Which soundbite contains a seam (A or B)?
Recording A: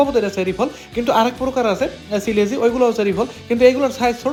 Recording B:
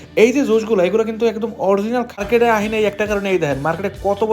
B